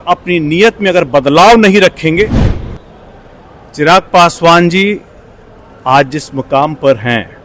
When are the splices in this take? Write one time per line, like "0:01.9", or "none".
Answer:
0:02.5